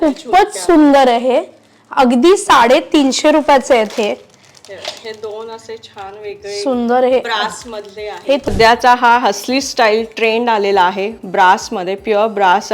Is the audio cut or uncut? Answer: cut